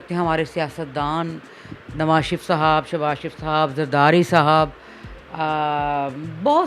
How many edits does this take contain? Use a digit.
0